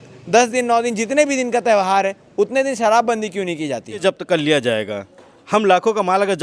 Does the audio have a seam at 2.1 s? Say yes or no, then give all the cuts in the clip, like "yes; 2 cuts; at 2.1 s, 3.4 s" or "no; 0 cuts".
no; 1 cut; at 4.0 s